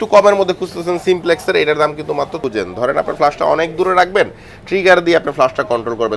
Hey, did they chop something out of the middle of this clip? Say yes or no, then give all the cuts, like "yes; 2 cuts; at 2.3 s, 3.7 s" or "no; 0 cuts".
yes; 1 cut; at 2.4 s